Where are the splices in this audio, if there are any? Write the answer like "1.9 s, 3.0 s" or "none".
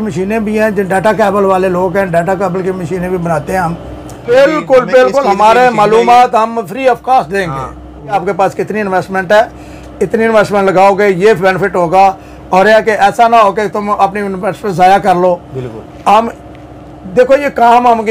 4.3 s, 8.2 s